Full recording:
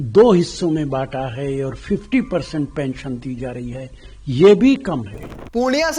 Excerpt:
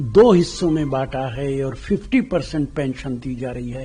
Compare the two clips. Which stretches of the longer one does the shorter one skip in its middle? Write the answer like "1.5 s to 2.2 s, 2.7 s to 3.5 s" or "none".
none